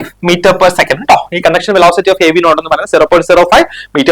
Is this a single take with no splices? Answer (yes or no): yes